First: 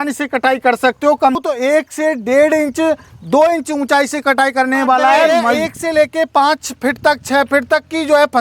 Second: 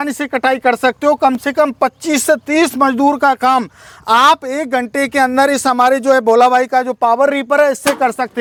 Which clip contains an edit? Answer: first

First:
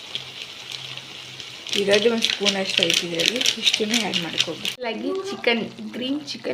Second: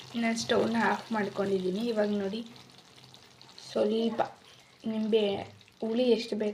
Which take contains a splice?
first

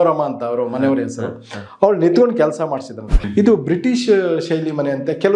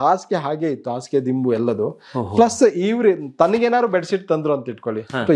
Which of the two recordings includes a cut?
first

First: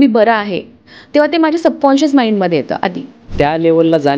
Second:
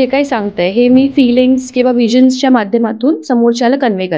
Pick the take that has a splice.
first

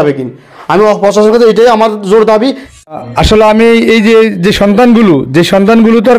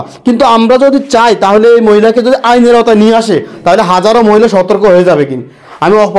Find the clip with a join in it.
first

